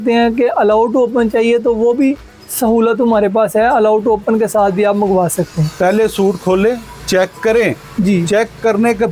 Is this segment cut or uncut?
uncut